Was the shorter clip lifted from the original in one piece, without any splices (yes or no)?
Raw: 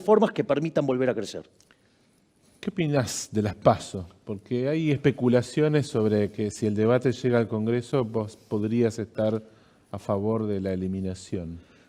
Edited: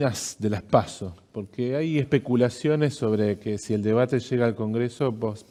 yes